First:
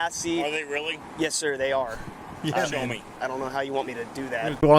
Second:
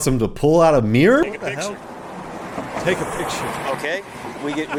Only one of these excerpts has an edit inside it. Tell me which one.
first; 1 cut; at 3.1 s

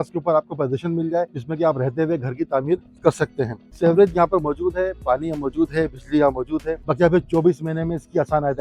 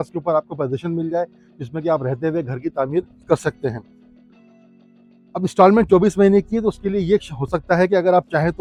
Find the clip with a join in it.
first; 3 cuts; at 1.4 s, 3.6 s, 6.8 s

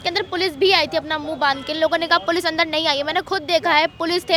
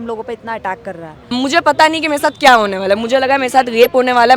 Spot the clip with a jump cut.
second; 1 cut; at 1.1 s

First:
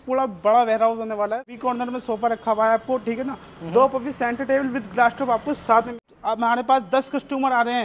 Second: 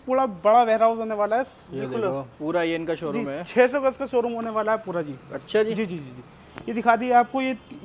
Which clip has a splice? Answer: first; 2 cuts; at 1.5 s, 6.0 s

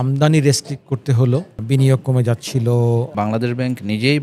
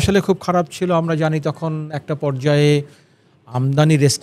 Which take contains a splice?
first; 2 cuts; at 1.6 s, 3.1 s

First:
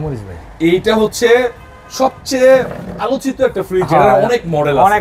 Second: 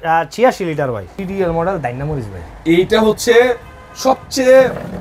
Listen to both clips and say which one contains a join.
second; 1 cut; at 1.1 s

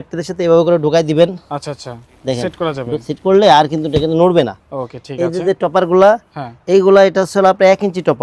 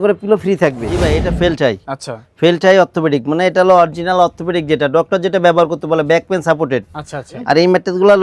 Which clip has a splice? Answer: second; 2 cuts; at 1.2 s, 7.3 s

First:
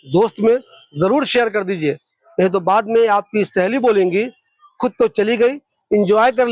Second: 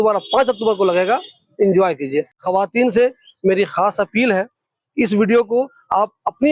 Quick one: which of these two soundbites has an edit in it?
second; 1 cut; at 2.4 s

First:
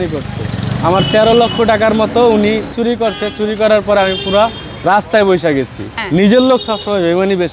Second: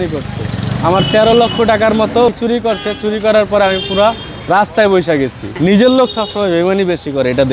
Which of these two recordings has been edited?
second; 2 cuts; at 2.3 s, 5.4 s

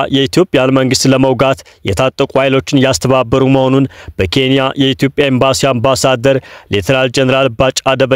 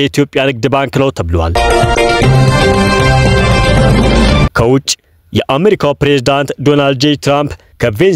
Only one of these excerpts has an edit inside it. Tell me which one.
second; 2 cuts; at 1.5 s, 4.5 s

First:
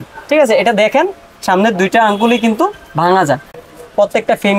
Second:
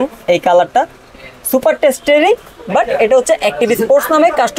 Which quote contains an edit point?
first; 1 cut; at 3.6 s

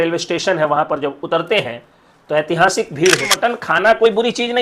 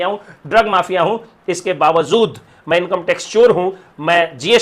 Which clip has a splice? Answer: first; 1 cut; at 3.3 s

